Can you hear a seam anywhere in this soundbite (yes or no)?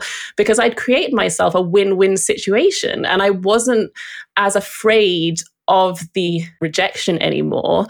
no